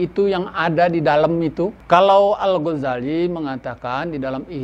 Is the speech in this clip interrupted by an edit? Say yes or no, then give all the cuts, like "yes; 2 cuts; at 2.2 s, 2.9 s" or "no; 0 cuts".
yes; 1 cut; at 1.8 s